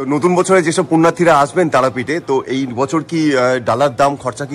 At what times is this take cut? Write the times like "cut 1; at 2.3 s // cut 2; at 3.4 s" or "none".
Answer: none